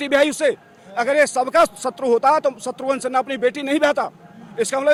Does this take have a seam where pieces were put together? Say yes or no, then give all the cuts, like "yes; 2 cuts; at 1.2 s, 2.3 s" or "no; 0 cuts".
no; 0 cuts